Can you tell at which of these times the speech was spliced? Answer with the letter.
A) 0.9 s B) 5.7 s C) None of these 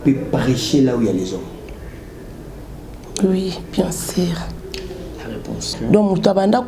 B